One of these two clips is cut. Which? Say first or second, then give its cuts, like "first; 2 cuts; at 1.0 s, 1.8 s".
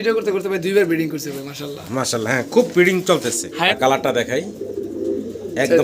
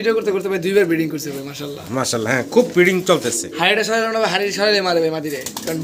first; 1 cut; at 3.7 s